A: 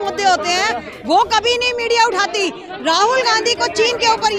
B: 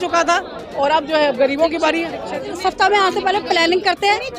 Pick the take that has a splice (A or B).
B